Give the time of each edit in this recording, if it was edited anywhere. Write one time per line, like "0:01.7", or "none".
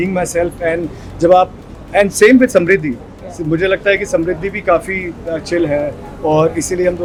none